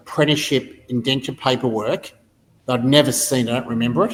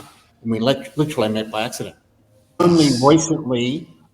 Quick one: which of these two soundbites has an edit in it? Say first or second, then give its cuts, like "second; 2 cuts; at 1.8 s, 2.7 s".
second; 1 cut; at 2.6 s